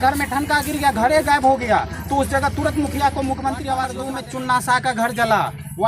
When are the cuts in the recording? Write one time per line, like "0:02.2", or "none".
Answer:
0:04.0